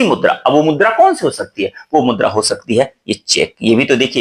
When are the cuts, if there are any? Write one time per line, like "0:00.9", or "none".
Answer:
none